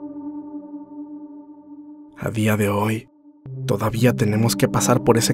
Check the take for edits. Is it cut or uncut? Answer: cut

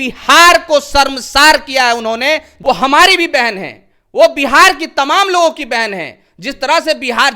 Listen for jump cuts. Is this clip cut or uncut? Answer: cut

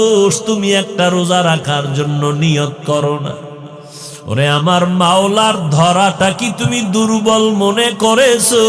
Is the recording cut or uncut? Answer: uncut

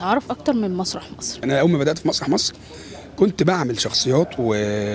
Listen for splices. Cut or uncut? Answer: cut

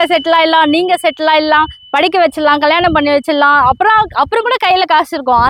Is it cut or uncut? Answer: uncut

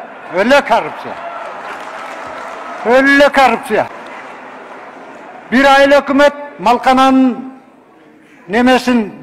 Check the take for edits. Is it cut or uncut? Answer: cut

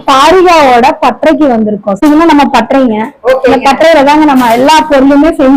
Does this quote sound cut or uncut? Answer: uncut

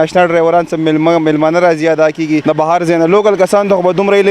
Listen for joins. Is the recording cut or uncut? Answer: cut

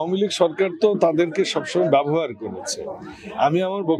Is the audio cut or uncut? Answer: uncut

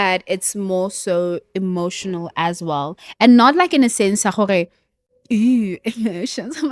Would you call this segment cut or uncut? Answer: uncut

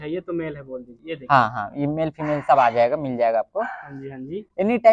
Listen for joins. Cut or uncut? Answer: uncut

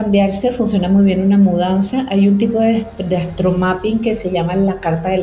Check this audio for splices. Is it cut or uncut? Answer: uncut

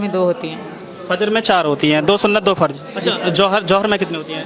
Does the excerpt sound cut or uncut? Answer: cut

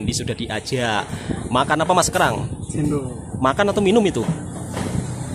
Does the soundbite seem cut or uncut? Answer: uncut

